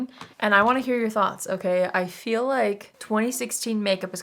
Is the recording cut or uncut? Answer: cut